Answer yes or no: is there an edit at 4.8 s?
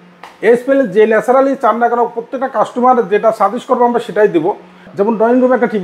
yes